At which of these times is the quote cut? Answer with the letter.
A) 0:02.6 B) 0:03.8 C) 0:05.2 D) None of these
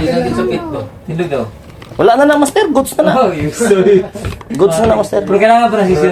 D